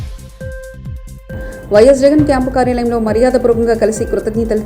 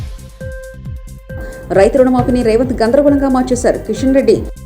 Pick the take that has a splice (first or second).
second